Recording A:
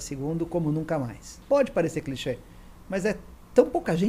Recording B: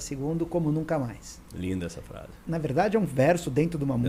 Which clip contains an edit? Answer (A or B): A